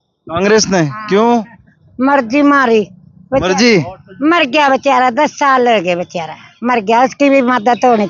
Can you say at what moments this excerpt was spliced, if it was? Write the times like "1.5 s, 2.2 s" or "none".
none